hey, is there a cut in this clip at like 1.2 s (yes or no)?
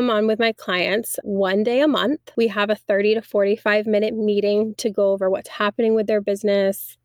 yes